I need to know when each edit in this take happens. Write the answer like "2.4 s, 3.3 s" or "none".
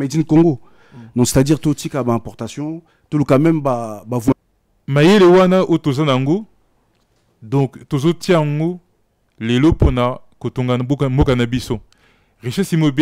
4.3 s